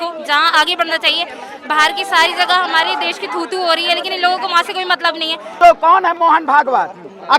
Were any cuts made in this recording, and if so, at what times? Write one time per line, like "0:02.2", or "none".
0:05.6